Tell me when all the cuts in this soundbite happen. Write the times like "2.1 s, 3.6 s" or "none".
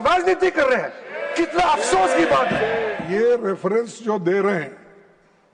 2.9 s

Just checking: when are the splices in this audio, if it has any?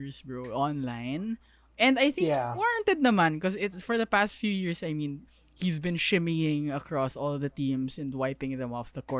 none

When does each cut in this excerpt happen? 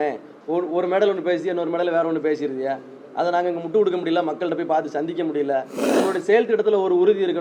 5.8 s

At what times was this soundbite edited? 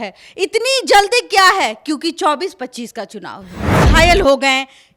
3.7 s

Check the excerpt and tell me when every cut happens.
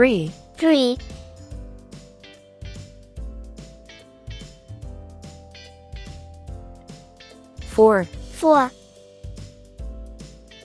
1.0 s, 7.8 s, 8.8 s

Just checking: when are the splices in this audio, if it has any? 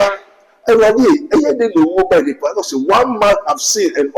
none

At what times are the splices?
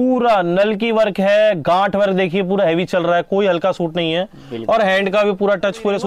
none

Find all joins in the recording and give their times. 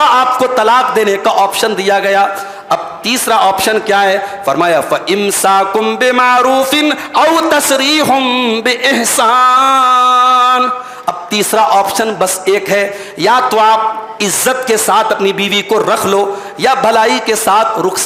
none

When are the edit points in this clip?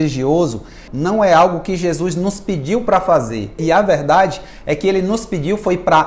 3.6 s

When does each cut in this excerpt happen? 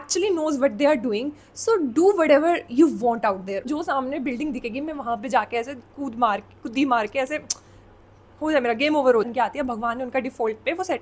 3.7 s, 9.3 s

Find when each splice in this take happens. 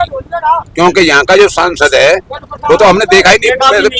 none

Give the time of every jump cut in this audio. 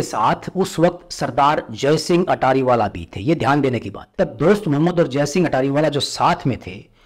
4.0 s

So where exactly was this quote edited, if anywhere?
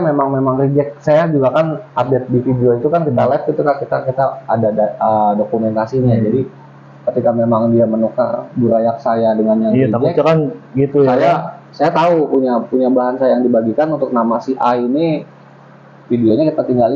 none

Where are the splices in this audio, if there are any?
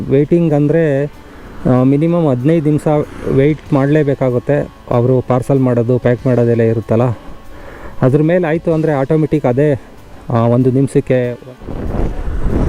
11.5 s

